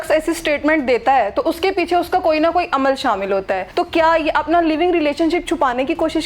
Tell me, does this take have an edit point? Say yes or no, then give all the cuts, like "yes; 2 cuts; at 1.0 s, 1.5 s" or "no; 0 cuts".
yes; 1 cut; at 3.7 s